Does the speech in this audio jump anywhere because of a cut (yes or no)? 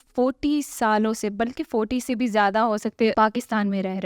yes